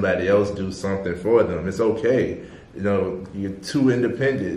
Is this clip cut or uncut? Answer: uncut